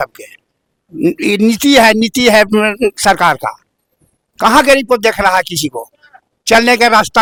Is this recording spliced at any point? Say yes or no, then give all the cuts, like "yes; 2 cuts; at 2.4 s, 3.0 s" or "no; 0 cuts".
no; 0 cuts